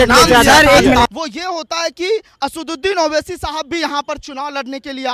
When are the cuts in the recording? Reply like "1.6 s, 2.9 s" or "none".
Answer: 1.1 s